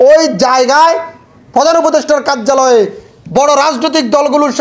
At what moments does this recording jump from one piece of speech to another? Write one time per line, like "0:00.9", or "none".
none